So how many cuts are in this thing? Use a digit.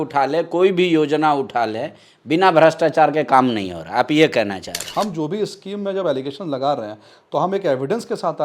1